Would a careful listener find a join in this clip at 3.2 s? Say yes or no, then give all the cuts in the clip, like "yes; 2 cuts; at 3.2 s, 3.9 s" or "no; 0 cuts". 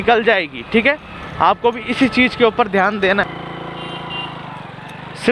yes; 1 cut; at 3.2 s